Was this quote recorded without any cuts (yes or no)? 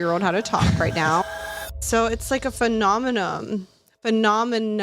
no